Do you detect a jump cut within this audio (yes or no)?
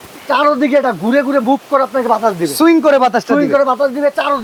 no